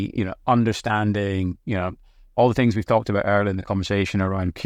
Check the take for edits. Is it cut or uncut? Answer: uncut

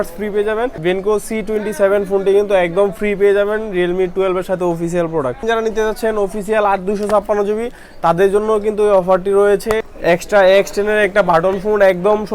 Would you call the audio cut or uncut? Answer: cut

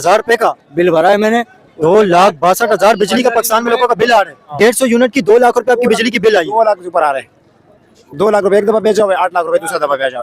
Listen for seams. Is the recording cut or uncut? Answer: cut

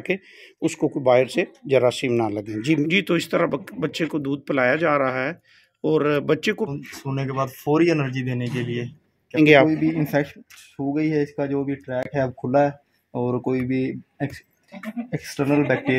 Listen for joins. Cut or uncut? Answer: cut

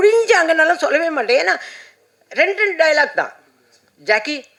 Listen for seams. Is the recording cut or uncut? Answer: uncut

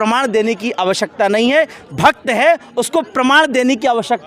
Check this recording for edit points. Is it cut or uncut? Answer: uncut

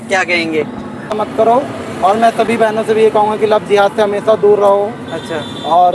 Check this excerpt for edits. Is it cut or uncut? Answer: cut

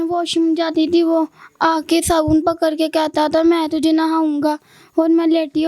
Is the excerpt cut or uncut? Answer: uncut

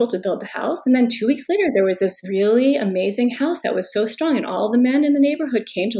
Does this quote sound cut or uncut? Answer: cut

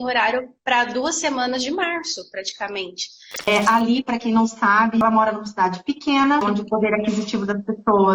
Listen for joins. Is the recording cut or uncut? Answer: cut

